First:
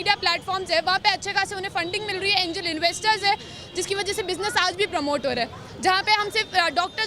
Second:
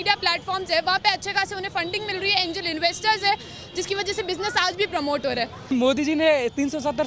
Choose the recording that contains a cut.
second; 1 cut; at 5.6 s

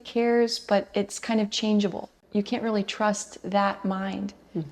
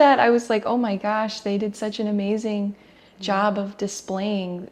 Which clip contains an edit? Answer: first; 1 cut; at 2.2 s

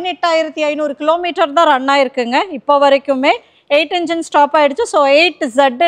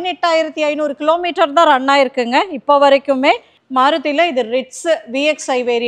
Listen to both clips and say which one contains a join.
second; 1 cut; at 3.5 s

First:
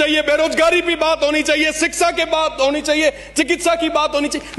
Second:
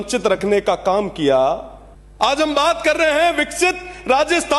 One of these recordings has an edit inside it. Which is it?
second; 1 cut; at 1.8 s

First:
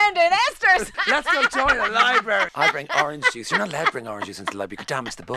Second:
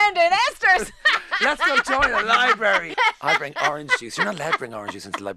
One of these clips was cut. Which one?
first; 2 cuts; at 0.9 s, 2.5 s

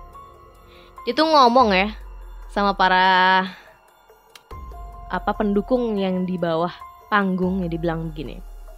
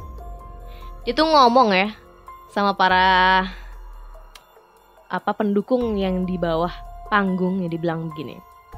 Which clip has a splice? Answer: first; 2 cuts; at 3.6 s, 5.1 s

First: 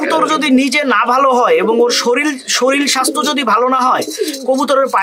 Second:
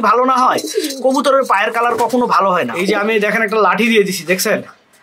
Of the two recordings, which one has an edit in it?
second; 1 cut; at 2.8 s

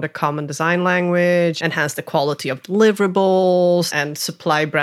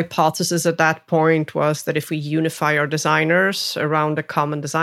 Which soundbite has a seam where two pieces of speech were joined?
first; 2 cuts; at 1.6 s, 3.9 s

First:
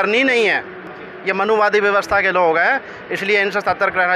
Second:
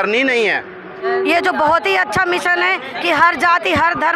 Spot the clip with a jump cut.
second; 1 cut; at 1.0 s

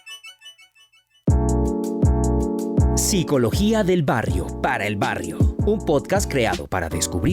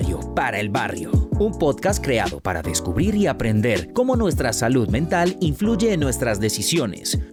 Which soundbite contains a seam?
first; 1 cut; at 1.3 s

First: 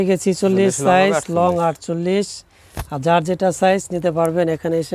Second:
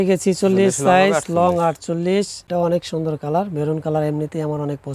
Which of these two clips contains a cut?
second; 1 cut; at 2.4 s

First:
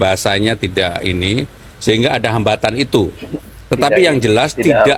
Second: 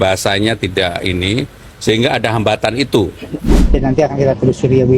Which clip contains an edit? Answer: second; 1 cut; at 3.6 s

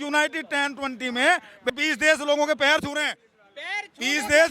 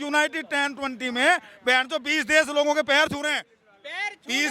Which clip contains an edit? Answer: first; 1 cut; at 1.7 s

